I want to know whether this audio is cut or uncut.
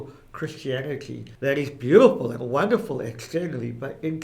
cut